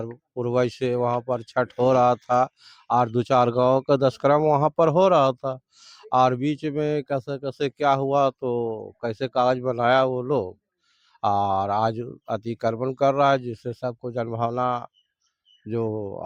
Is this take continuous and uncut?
yes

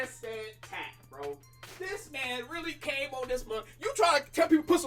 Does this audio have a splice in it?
no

